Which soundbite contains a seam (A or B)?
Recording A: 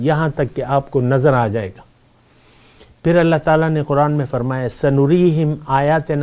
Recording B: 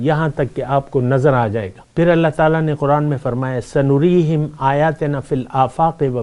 B